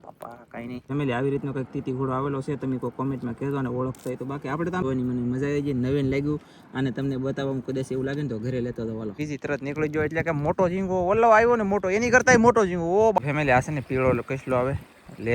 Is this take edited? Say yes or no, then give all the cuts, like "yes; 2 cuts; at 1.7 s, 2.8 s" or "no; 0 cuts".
yes; 4 cuts; at 0.8 s, 4.8 s, 9.2 s, 13.2 s